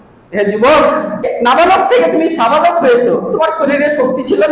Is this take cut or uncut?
cut